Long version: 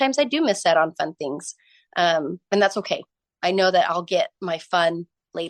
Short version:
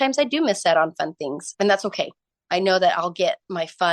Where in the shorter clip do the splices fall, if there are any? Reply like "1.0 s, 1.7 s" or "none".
1.5 s